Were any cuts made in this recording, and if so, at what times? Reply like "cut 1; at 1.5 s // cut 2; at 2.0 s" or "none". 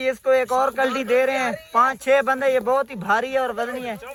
none

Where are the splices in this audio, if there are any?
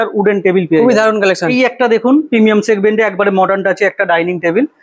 cut 1; at 1.5 s

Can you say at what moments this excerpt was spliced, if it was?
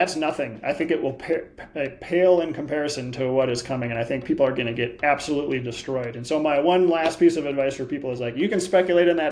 none

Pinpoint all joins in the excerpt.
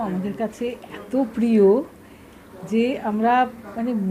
none

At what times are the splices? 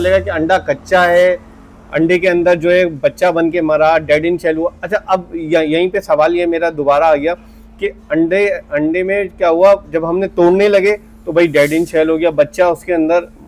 none

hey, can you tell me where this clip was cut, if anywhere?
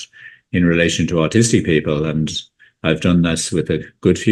none

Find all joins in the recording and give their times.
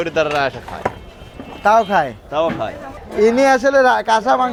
none

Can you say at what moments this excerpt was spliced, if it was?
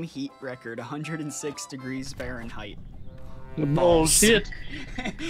none

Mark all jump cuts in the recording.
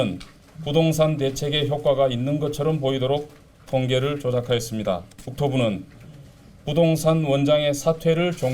cut 1; at 5.3 s

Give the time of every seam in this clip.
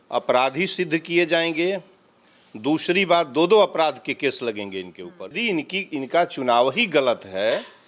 cut 1; at 5.3 s

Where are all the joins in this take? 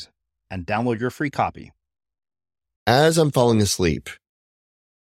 cut 1; at 2.8 s

